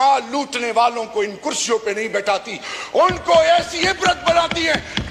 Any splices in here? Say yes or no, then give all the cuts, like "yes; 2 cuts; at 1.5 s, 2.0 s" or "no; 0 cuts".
no; 0 cuts